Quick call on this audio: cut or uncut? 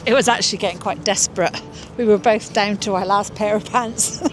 uncut